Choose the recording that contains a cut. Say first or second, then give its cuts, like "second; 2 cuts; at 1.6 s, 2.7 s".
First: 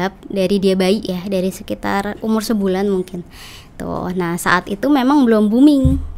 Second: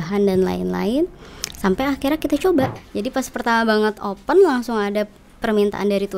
second; 1 cut; at 2.8 s